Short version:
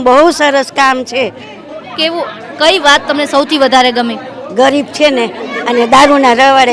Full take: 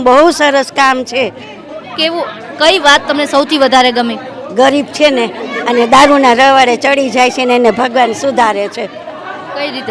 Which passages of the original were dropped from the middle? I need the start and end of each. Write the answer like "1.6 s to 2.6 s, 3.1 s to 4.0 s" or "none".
none